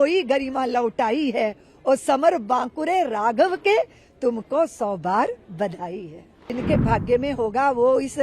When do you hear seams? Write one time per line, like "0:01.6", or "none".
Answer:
0:06.5